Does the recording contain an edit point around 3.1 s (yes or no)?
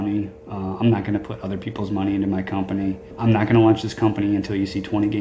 yes